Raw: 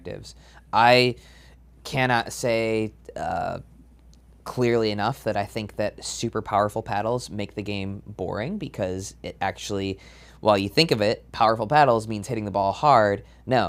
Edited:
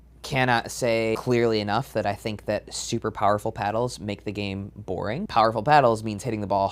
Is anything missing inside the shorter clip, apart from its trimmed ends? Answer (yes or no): yes